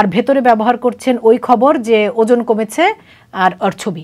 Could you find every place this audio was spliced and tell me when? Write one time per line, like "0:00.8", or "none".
none